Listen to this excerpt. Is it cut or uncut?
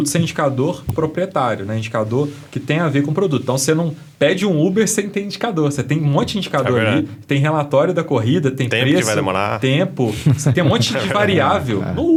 uncut